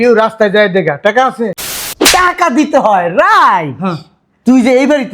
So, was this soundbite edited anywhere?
yes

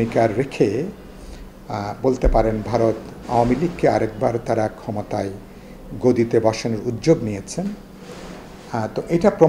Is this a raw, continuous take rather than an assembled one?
yes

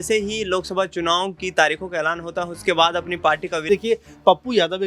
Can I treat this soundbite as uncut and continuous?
no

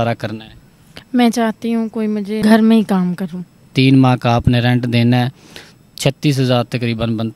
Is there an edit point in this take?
yes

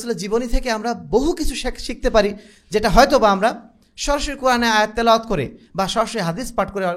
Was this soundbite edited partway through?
no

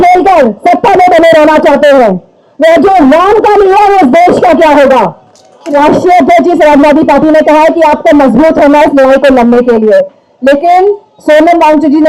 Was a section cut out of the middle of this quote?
yes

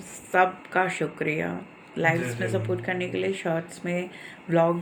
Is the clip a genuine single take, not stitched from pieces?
yes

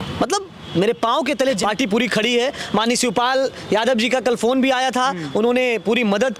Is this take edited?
yes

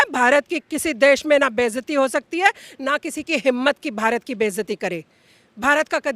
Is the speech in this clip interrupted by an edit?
no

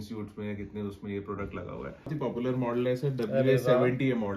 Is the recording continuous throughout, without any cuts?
no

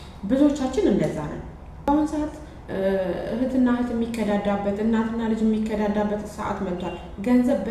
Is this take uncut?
no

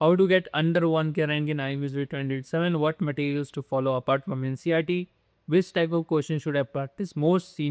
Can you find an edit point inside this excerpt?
no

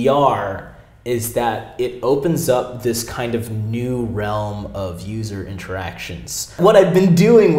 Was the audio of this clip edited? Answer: yes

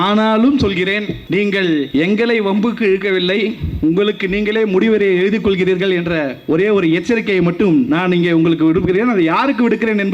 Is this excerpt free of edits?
no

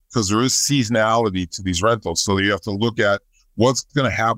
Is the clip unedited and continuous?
yes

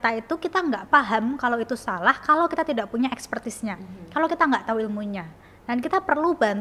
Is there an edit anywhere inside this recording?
no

